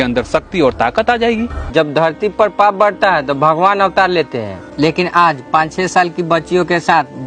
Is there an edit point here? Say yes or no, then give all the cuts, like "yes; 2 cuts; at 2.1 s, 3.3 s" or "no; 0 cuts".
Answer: yes; 1 cut; at 1.6 s